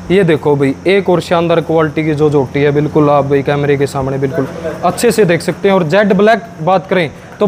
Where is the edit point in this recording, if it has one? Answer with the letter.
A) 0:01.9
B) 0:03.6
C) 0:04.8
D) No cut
D